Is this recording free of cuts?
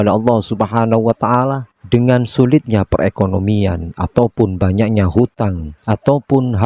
yes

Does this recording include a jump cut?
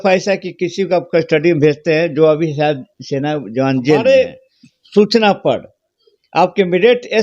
yes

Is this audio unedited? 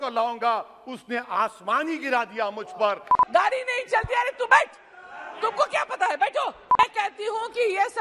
no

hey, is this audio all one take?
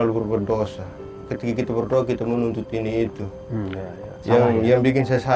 no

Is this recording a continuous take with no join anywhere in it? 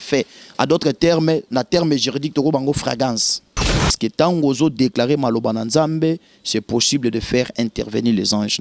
no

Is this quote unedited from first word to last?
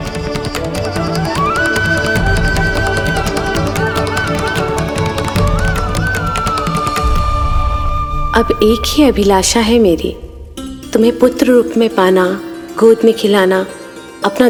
yes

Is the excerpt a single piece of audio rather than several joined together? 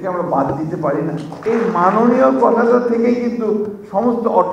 no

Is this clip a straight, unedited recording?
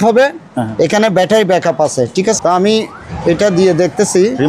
no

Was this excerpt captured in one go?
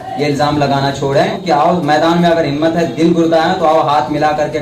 no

